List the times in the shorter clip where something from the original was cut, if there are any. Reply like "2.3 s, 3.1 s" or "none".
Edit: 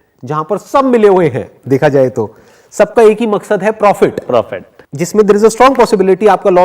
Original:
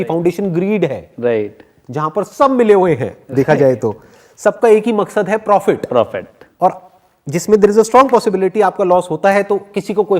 4.3 s